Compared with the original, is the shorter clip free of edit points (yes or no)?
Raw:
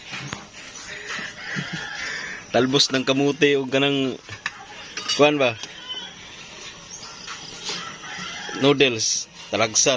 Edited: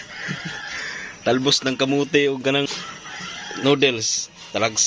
no